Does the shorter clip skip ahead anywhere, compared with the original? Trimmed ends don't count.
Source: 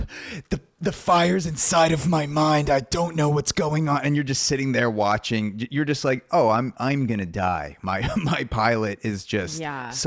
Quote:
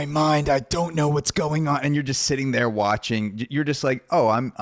no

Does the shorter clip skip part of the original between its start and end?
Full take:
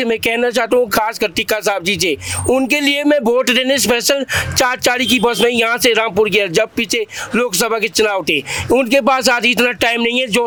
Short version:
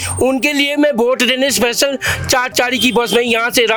no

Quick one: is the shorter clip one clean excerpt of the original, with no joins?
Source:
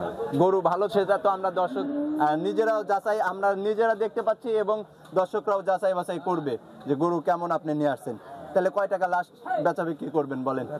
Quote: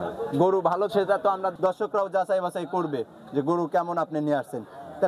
no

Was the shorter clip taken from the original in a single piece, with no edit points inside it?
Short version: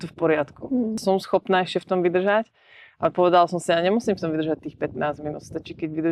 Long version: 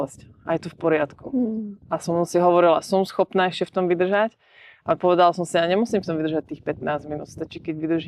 no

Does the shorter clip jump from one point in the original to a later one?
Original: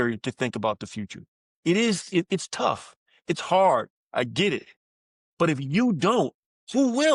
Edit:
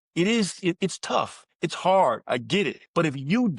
yes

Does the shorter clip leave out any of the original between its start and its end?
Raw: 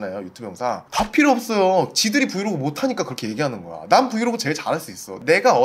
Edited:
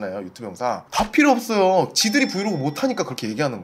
no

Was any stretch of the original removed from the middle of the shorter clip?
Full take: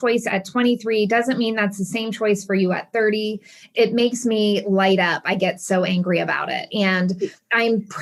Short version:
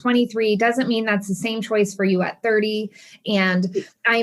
yes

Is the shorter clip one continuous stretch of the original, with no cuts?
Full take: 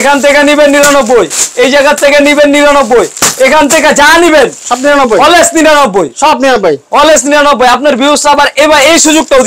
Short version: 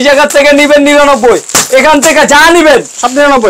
yes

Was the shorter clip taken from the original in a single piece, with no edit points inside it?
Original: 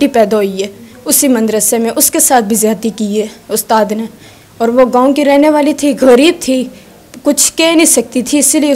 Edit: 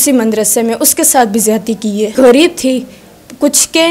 no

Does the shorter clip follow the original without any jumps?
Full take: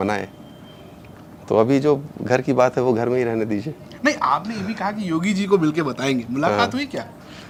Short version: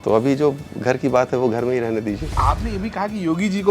no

